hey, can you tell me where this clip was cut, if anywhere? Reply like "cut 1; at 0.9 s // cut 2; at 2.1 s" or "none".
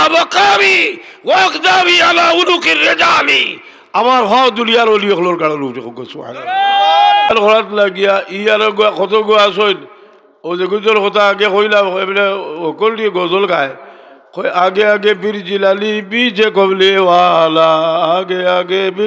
cut 1; at 7.3 s